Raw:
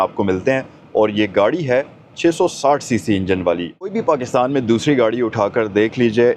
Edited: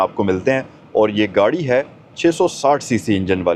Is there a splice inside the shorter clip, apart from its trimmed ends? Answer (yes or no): no